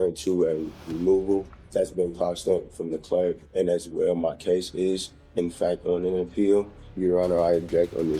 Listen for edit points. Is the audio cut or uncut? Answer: cut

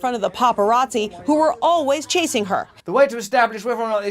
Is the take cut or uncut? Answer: cut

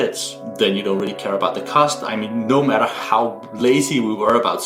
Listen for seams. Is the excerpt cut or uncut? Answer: uncut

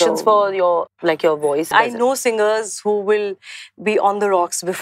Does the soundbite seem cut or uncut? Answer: cut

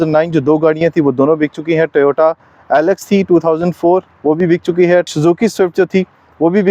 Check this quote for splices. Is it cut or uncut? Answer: uncut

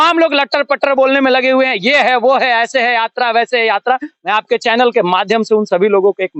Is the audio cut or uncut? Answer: uncut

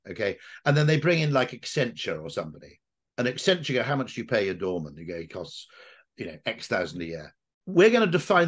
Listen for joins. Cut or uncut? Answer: cut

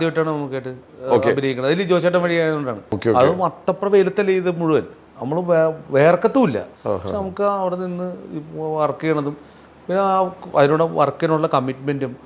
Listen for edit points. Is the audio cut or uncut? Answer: cut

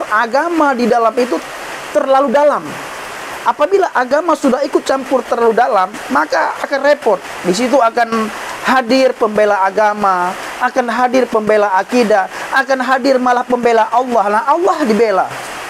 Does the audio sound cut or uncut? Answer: uncut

